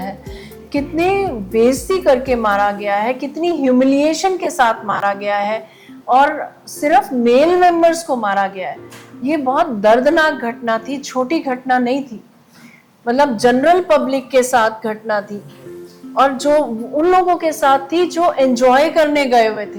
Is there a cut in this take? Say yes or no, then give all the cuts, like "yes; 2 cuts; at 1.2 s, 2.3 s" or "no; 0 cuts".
no; 0 cuts